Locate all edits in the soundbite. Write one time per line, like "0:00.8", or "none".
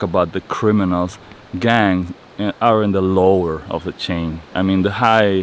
none